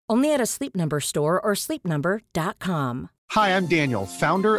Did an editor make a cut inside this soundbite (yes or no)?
yes